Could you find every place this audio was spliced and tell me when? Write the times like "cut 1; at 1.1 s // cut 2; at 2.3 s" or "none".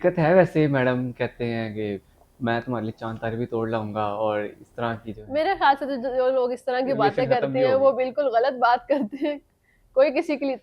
none